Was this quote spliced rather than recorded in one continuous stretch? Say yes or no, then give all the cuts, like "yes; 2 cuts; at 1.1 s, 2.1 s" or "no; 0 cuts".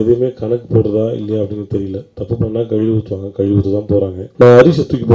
yes; 1 cut; at 4.2 s